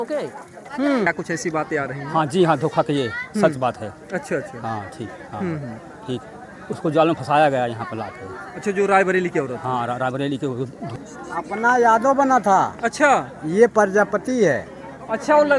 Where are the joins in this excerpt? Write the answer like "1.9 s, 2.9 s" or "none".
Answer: 1.1 s, 10.9 s

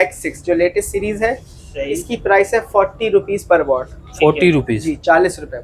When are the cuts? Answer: none

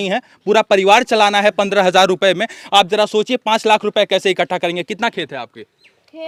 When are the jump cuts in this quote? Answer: none

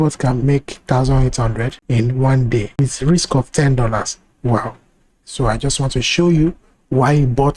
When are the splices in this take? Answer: 1.8 s, 2.8 s, 5.2 s

